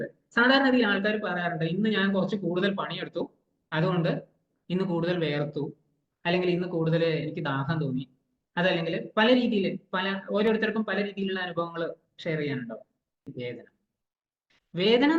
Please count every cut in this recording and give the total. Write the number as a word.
one